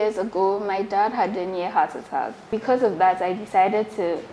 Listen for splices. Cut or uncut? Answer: cut